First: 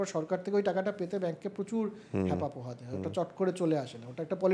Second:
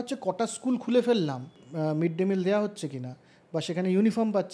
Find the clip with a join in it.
second; 1 cut; at 1.6 s

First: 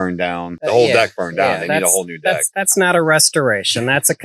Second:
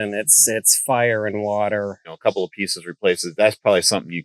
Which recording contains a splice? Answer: second; 1 cut; at 2.0 s

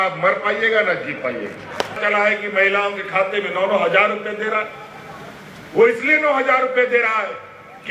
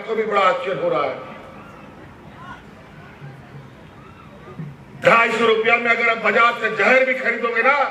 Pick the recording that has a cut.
first; 1 cut; at 2.0 s

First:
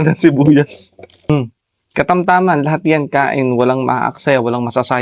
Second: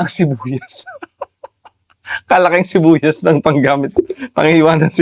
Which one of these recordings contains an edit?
first; 1 cut; at 1.3 s

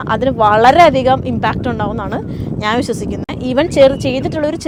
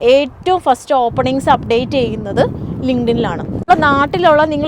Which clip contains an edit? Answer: second; 1 cut; at 3.6 s

